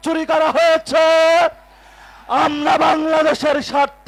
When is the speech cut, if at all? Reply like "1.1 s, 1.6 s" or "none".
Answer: none